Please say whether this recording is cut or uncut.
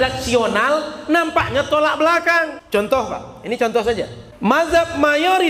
cut